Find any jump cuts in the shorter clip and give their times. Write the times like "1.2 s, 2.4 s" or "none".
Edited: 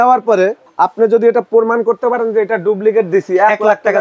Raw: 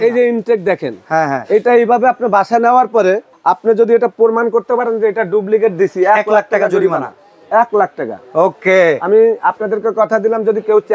none